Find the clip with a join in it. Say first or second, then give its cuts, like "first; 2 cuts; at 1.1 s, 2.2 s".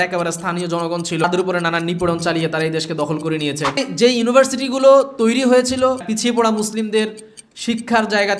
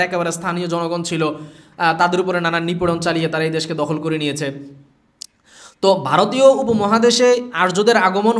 first; 3 cuts; at 1.2 s, 3.8 s, 6.0 s